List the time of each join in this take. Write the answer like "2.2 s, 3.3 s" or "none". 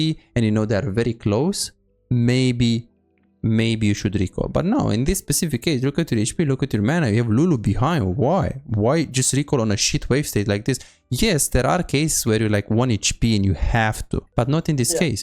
14.3 s